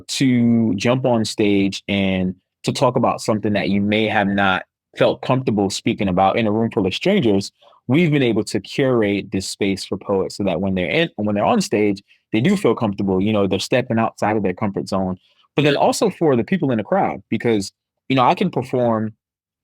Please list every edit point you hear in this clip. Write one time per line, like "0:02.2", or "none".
0:04.8